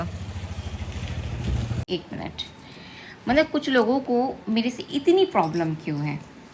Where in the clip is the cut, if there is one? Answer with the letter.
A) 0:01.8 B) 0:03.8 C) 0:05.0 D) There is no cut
A